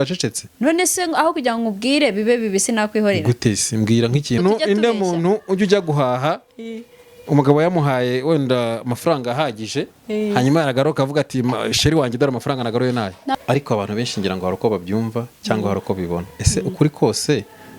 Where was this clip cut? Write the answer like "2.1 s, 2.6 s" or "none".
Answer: 4.4 s, 13.4 s